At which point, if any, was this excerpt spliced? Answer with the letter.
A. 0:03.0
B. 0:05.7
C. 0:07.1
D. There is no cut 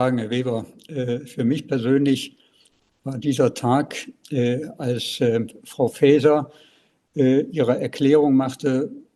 D